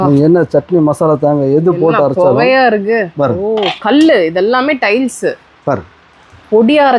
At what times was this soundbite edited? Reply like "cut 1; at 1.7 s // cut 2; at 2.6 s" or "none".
none